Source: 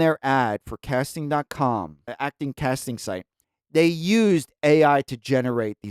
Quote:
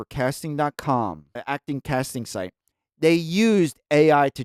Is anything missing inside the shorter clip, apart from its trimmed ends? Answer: no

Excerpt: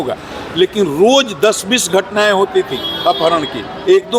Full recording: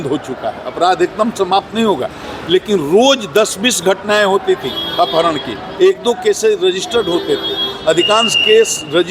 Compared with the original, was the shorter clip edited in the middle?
no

